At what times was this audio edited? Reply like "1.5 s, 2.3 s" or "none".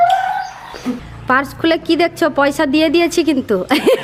1.1 s